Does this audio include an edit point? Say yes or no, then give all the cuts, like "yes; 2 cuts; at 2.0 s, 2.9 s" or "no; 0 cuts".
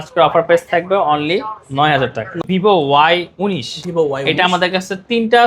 yes; 1 cut; at 2.4 s